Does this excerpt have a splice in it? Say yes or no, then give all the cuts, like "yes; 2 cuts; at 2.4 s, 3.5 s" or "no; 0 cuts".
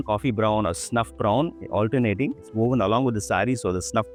no; 0 cuts